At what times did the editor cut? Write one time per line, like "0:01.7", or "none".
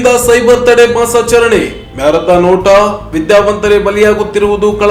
none